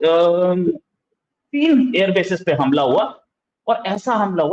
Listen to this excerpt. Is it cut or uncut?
uncut